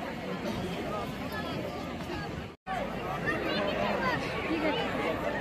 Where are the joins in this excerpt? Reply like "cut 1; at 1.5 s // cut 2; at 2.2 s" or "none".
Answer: cut 1; at 2.6 s